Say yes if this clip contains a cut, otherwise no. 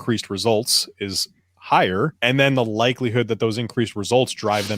yes